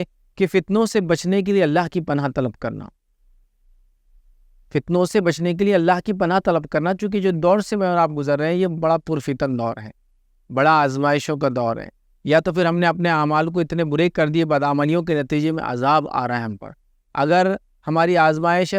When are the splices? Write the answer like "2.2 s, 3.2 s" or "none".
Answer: none